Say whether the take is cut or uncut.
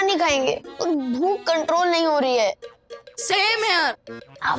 uncut